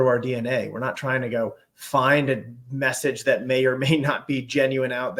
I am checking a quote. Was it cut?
no; 0 cuts

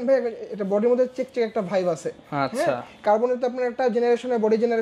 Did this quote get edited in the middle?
no; 0 cuts

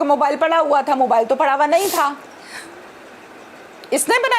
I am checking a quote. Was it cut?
no; 0 cuts

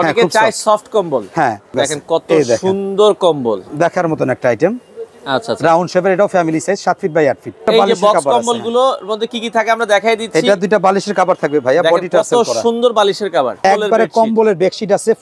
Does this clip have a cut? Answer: yes; 3 cuts; at 1.7 s, 7.7 s, 13.6 s

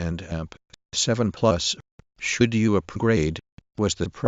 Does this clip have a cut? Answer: no; 0 cuts

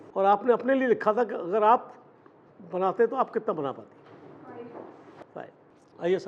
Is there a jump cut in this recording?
yes; 1 cut; at 5.2 s

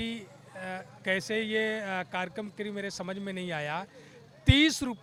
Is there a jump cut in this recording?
no; 0 cuts

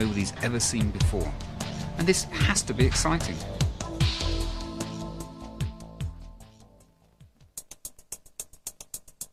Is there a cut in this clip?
no; 0 cuts

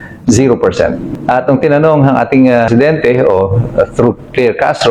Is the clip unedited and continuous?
no; 2 cuts; at 1.1 s, 2.7 s

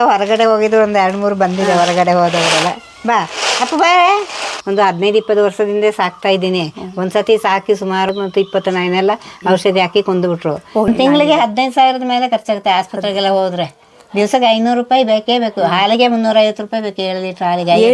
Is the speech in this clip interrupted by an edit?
yes; 3 cuts; at 4.6 s, 8.1 s, 10.6 s

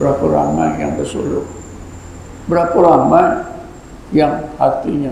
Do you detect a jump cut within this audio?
no; 0 cuts

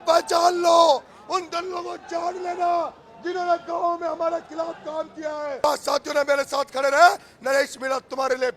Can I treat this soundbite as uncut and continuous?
no; 1 cut; at 5.6 s

